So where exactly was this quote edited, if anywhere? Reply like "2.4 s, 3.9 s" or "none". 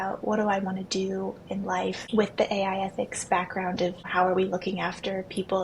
2.0 s, 4.0 s